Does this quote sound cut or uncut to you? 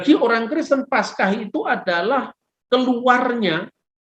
uncut